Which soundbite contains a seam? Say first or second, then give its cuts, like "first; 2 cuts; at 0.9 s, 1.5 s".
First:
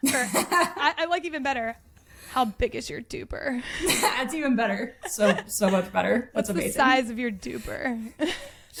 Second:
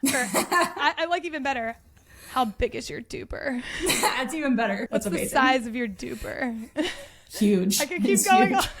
second; 1 cut; at 4.8 s